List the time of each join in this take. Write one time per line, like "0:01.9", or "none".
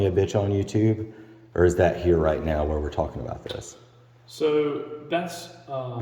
none